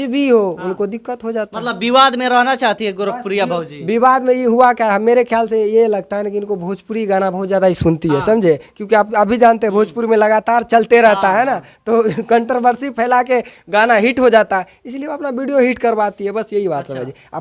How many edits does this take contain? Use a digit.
0